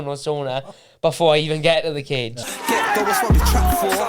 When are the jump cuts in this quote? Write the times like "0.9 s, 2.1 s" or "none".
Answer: 2.4 s